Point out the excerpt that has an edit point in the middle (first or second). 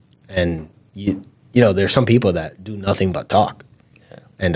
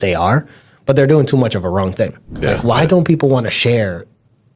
second